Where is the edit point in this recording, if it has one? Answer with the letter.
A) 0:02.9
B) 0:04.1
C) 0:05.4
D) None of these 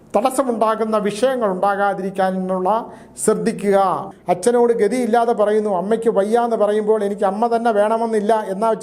B